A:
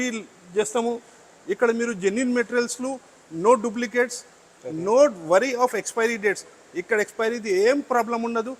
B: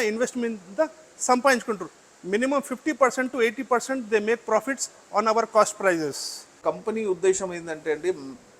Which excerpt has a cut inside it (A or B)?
B